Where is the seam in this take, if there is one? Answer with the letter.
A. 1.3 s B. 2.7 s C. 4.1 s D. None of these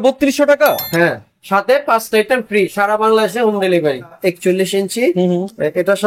C